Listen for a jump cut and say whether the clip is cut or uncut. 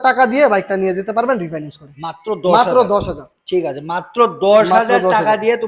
uncut